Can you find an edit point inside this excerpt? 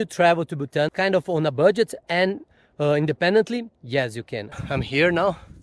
yes; 1 cut; at 4.4 s

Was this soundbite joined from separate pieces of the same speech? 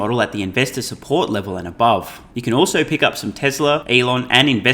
yes; 2 cuts; at 2.2 s, 3.8 s

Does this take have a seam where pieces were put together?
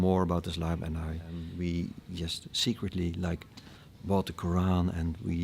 yes; 1 cut; at 1.4 s

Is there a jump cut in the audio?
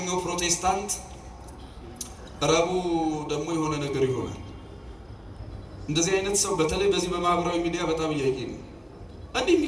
no; 0 cuts

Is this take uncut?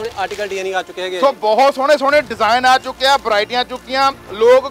yes; 0 cuts

